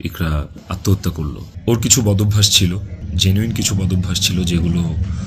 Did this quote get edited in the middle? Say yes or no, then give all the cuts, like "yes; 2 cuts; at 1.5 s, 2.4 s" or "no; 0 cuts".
yes; 1 cut; at 1.5 s